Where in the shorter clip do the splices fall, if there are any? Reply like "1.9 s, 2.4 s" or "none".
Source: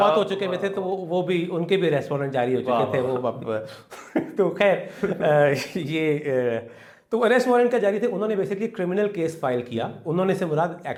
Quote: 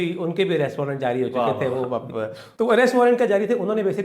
2.4 s